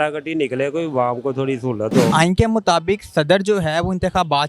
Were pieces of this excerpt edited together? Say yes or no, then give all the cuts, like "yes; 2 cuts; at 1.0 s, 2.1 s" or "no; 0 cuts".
yes; 1 cut; at 2.1 s